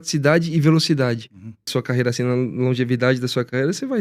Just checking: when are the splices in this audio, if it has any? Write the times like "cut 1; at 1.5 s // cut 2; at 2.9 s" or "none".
cut 1; at 1.7 s